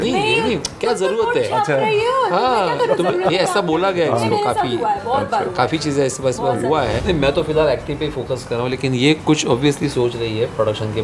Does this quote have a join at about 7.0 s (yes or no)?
yes